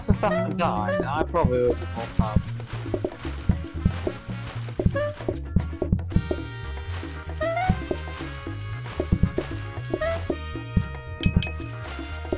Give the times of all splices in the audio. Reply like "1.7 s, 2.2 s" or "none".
none